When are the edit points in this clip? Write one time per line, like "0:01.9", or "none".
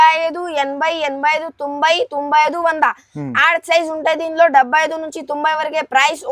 none